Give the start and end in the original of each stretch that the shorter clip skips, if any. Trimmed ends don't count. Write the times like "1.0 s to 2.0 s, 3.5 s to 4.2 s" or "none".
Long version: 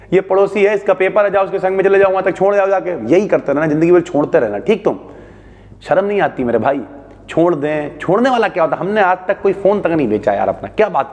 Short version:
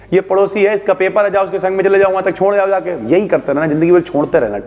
none